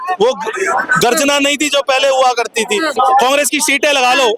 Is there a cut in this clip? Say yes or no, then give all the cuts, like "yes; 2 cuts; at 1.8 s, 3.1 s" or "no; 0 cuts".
yes; 1 cut; at 2.9 s